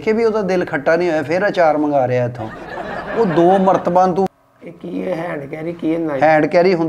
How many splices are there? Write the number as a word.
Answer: one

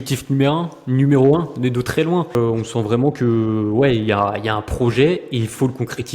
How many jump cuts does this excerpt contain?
one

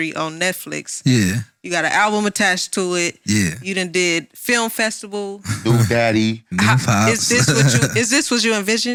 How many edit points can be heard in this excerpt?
zero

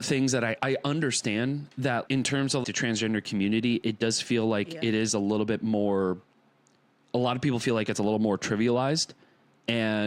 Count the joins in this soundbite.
one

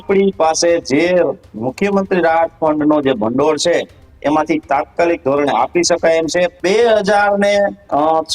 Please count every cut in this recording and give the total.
one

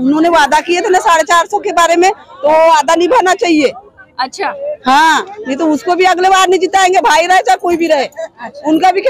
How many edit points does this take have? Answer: zero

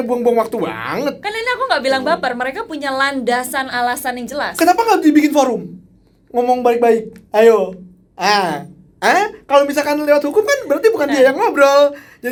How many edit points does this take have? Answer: zero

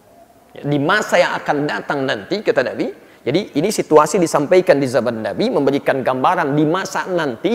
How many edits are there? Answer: zero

